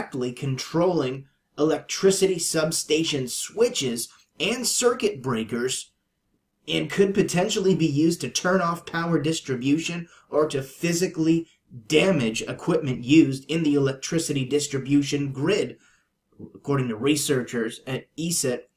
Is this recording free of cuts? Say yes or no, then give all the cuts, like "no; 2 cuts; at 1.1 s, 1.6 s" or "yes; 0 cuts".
no; 1 cut; at 7.1 s